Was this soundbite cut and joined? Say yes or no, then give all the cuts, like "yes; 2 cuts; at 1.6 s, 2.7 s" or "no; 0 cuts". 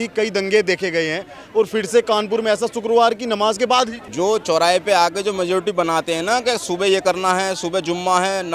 yes; 1 cut; at 4.0 s